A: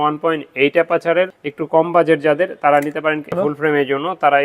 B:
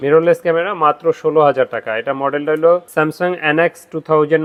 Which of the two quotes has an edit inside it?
A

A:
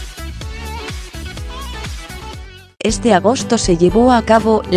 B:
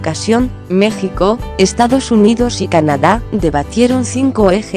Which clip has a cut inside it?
B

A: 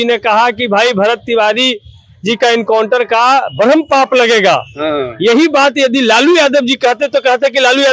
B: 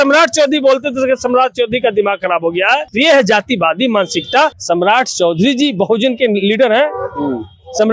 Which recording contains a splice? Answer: B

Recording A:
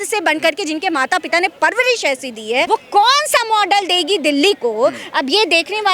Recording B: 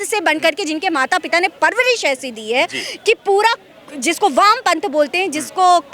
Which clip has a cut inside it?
A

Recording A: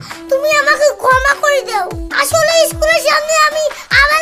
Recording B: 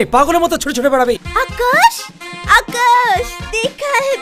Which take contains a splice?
B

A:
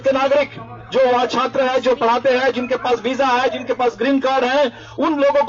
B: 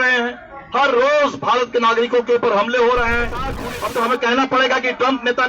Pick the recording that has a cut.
B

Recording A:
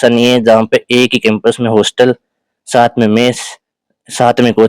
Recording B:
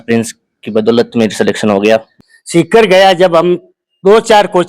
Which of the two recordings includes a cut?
B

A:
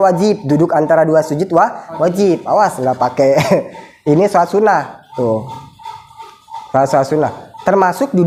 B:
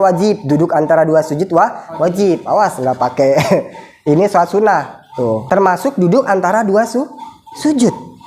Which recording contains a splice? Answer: B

